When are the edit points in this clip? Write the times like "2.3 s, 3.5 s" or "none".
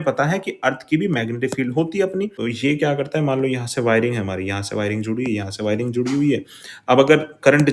2.3 s